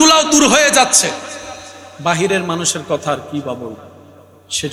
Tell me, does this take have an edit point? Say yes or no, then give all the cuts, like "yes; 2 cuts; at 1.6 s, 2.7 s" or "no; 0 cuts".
no; 0 cuts